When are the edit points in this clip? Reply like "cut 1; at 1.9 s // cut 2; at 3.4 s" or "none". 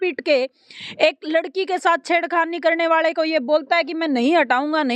none